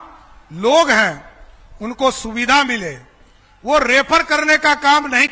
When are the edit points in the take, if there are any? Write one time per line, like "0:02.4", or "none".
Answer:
none